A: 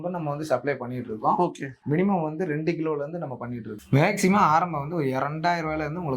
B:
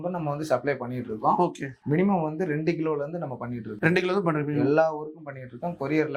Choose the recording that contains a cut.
A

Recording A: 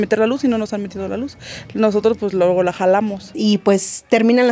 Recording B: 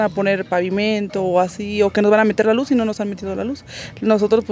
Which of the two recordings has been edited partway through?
A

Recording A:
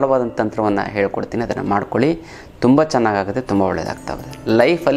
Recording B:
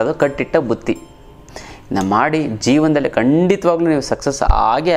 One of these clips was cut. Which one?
B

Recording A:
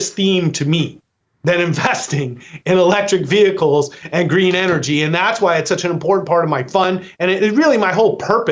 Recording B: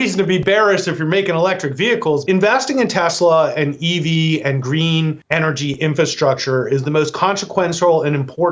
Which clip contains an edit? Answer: B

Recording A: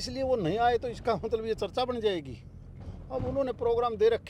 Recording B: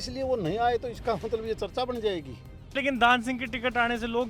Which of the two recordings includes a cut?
B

